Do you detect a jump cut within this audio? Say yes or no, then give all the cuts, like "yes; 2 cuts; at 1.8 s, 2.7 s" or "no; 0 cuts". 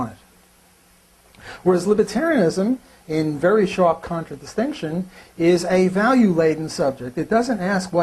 yes; 1 cut; at 5.6 s